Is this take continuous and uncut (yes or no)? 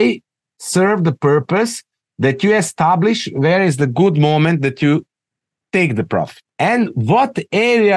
no